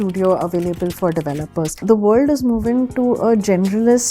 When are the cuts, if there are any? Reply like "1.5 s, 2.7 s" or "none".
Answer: 1.8 s